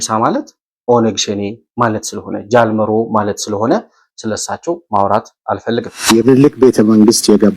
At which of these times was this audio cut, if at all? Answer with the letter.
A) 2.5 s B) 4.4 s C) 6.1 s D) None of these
C